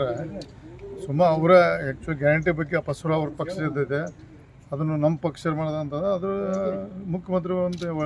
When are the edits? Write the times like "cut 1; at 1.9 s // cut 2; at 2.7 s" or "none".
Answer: cut 1; at 2.3 s